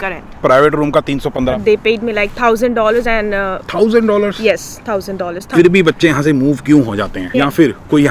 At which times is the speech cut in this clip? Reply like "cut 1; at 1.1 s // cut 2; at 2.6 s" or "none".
cut 1; at 1.6 s // cut 2; at 5.3 s // cut 3; at 7.3 s